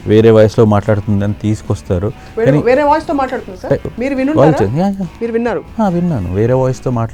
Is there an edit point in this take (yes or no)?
yes